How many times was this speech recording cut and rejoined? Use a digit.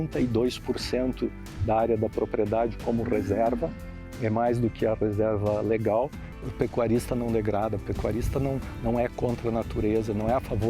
1